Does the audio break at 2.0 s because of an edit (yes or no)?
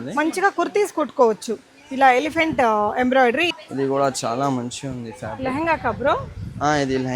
no